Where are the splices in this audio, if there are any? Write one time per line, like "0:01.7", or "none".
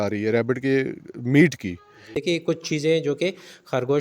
0:02.2